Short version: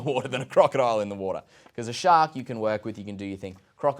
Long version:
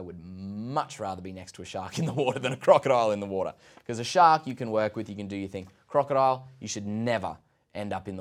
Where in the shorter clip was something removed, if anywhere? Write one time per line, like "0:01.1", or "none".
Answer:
none